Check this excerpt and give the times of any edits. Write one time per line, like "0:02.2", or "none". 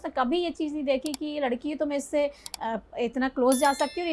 none